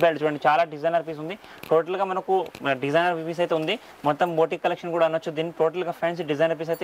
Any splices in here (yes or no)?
no